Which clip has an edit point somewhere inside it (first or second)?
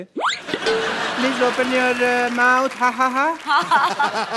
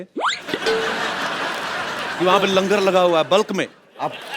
first